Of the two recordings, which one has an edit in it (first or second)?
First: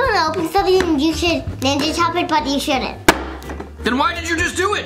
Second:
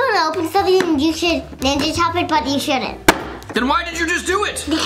second